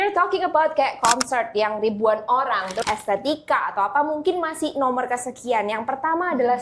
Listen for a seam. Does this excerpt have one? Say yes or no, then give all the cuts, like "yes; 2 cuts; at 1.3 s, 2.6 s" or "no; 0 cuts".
yes; 1 cut; at 2.8 s